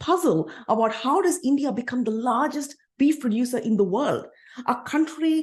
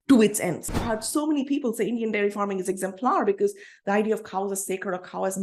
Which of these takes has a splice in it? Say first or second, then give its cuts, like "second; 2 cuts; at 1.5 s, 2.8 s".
second; 1 cut; at 0.9 s